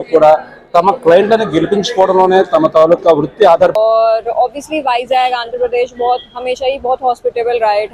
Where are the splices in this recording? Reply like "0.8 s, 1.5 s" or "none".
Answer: 3.8 s